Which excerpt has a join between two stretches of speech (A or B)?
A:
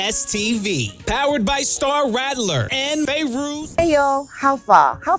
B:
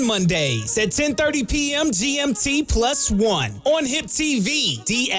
A